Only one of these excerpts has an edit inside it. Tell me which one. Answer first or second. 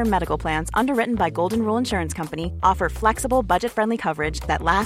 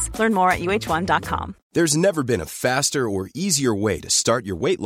second